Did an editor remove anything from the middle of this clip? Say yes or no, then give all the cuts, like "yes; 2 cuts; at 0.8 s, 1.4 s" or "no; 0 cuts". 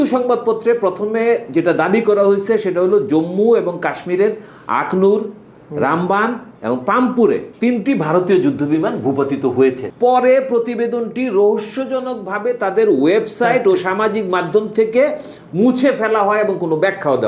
yes; 2 cuts; at 7.5 s, 9.9 s